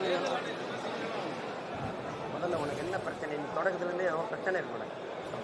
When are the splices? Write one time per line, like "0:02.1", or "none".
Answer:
none